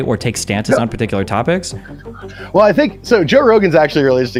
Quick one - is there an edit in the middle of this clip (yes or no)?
no